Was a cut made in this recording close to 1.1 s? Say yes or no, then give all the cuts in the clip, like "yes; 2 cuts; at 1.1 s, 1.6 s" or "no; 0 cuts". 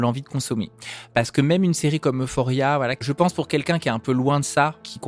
yes; 2 cuts; at 1.1 s, 3.0 s